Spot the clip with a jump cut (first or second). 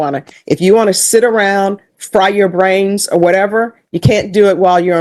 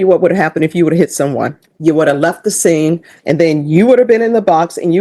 second